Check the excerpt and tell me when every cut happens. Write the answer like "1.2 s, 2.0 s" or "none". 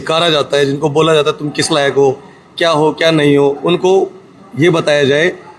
none